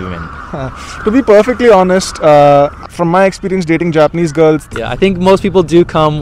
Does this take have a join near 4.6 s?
yes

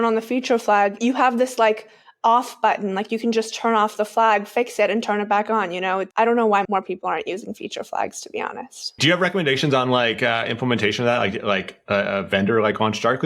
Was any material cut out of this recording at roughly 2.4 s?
no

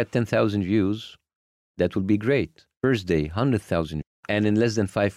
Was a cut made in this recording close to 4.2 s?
yes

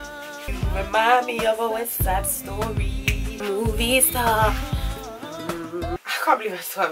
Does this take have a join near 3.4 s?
yes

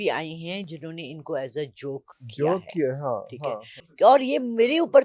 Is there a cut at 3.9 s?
yes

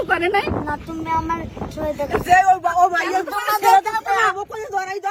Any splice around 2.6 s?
no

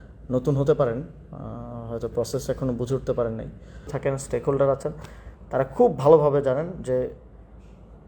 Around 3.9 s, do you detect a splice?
yes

